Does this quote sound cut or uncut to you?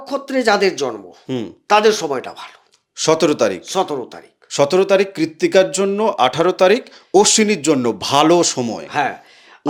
uncut